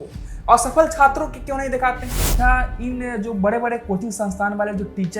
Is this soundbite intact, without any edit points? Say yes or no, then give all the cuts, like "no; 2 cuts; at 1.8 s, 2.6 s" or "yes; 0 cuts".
no; 1 cut; at 2.3 s